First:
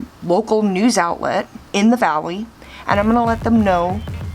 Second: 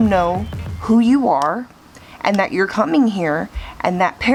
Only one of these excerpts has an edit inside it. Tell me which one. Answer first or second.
first